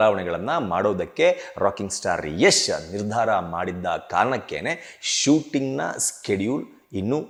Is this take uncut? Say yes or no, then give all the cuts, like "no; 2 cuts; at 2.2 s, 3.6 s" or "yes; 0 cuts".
yes; 0 cuts